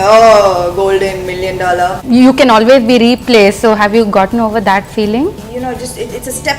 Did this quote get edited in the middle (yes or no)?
yes